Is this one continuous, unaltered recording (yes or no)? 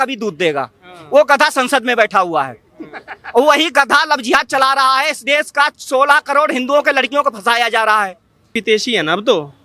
yes